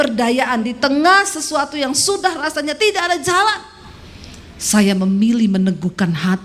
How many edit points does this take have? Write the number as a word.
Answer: zero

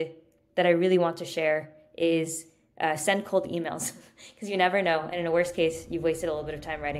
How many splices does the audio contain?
zero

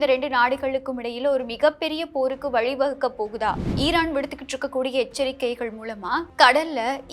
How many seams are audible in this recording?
one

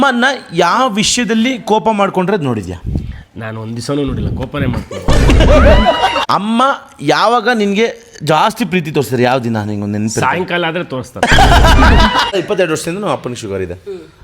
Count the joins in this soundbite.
two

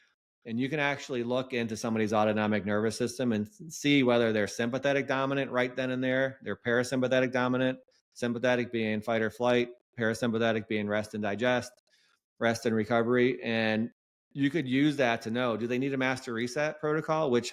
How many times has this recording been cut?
zero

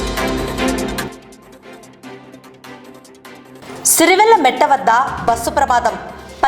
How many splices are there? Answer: two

